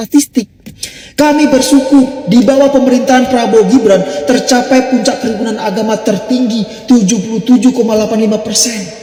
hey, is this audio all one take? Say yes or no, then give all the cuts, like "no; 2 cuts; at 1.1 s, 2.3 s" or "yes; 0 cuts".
yes; 0 cuts